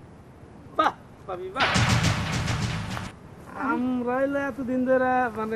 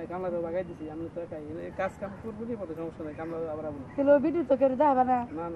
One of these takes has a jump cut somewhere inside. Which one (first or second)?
first